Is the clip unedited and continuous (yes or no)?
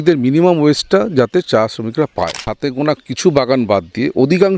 no